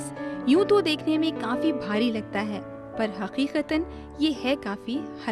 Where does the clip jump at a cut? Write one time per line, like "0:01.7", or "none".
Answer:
none